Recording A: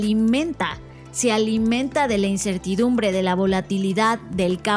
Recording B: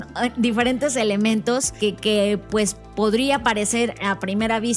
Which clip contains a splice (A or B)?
B